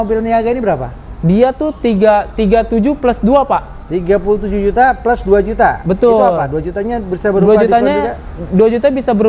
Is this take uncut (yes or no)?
yes